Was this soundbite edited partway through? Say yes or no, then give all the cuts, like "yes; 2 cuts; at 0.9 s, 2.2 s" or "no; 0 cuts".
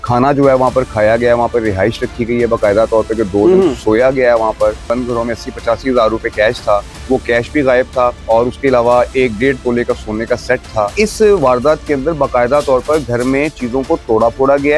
yes; 4 cuts; at 4.8 s, 6.9 s, 8.2 s, 10.9 s